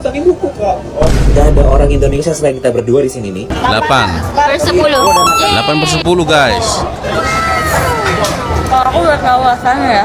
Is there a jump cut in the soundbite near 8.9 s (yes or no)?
no